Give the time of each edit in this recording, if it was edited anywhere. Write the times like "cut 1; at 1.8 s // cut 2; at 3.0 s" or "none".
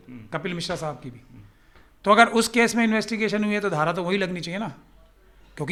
none